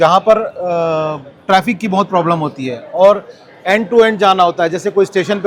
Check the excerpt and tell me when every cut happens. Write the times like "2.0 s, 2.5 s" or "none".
none